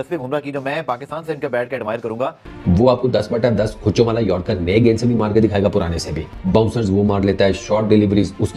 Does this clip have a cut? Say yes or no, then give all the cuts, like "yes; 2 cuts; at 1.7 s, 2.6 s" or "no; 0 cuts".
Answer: yes; 1 cut; at 2.5 s